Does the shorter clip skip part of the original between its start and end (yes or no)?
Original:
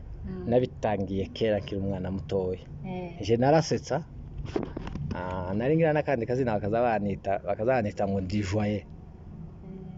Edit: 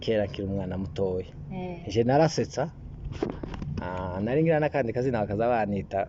no